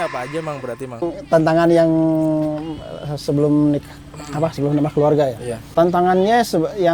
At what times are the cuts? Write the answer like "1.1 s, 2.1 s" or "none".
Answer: 1.1 s, 5.5 s